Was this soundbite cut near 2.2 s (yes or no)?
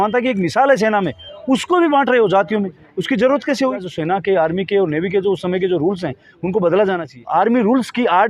no